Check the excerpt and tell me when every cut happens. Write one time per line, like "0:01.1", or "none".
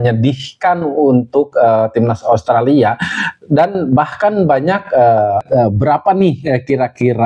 0:05.4